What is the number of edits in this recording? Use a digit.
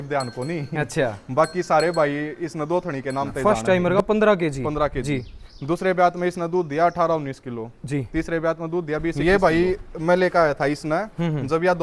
2